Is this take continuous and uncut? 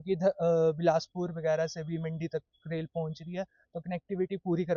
yes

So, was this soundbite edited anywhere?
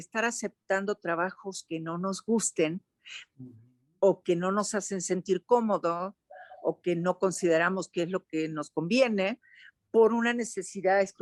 no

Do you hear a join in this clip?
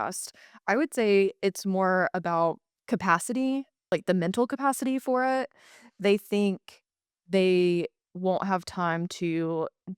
yes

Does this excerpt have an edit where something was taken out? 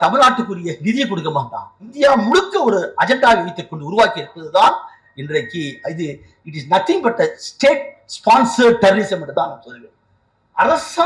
yes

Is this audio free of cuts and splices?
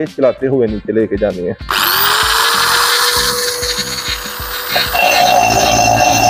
yes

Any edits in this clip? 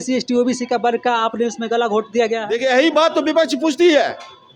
yes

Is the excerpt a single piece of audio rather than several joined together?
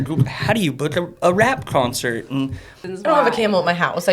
no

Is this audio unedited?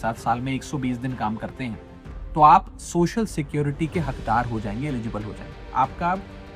no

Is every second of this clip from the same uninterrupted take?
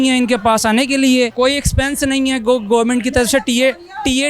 no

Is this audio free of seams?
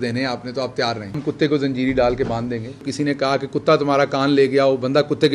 no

